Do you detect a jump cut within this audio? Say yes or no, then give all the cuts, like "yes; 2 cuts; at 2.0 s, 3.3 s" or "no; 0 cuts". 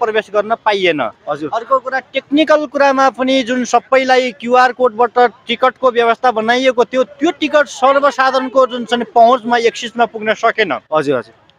no; 0 cuts